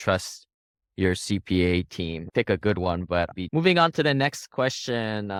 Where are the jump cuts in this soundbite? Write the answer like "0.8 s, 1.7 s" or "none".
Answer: none